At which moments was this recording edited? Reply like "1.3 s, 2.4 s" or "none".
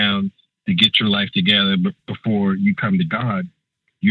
none

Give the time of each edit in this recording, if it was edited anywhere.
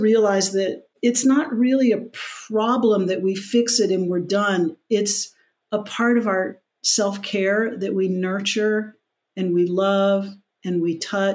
0.9 s

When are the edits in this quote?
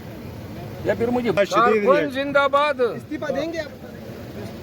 1.4 s

